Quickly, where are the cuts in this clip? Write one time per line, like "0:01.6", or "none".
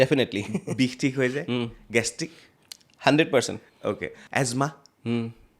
0:04.1